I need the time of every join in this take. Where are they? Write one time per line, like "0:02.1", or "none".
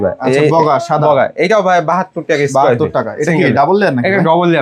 none